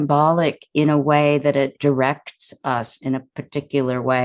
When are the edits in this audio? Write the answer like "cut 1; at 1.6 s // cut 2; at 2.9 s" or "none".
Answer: cut 1; at 1.8 s